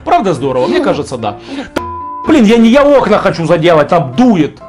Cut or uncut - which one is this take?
cut